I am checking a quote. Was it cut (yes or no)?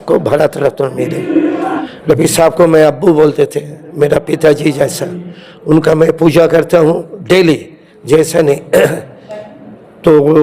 yes